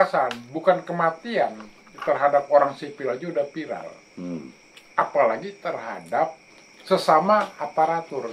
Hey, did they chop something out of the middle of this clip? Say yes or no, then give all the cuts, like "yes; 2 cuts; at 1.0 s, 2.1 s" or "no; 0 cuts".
no; 0 cuts